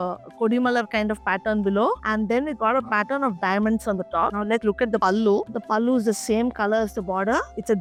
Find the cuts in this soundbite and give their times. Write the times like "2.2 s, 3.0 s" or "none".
none